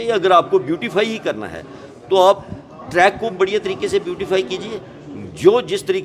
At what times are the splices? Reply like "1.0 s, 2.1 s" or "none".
none